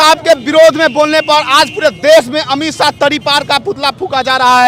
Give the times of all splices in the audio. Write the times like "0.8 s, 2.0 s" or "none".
none